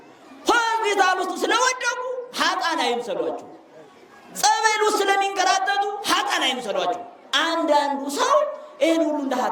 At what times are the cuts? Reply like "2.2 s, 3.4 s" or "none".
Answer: none